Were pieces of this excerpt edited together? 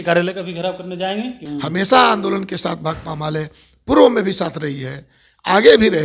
yes; 1 cut; at 1.4 s

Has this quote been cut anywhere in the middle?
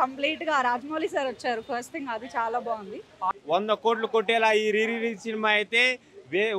yes; 1 cut; at 3.4 s

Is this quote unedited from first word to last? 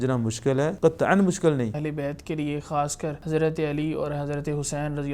no; 3 cuts; at 0.8 s, 1.8 s, 3.2 s

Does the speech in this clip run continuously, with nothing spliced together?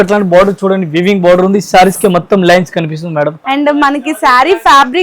no; 1 cut; at 3.4 s

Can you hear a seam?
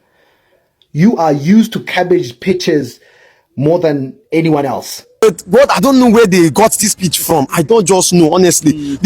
yes; 1 cut; at 5.2 s

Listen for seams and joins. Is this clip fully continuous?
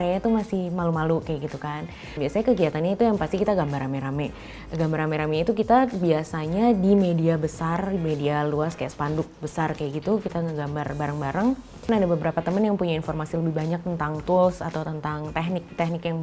no; 2 cuts; at 2.0 s, 11.9 s

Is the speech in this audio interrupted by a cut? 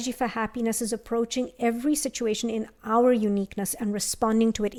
no; 0 cuts

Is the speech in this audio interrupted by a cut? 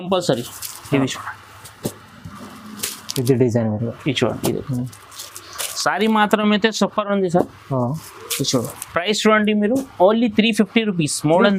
no; 0 cuts

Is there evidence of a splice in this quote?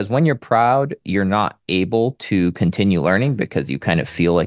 no; 0 cuts

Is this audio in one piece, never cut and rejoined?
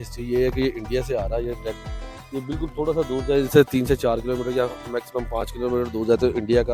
yes; 0 cuts

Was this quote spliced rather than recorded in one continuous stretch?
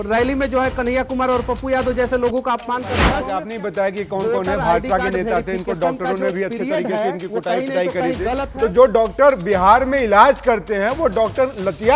yes; 1 cut; at 3.2 s

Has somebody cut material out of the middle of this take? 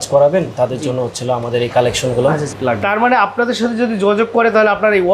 yes; 1 cut; at 2.5 s

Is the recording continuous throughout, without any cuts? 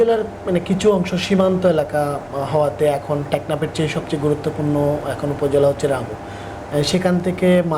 yes; 0 cuts

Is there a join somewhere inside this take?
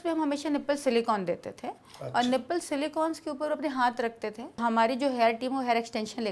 yes; 1 cut; at 4.6 s

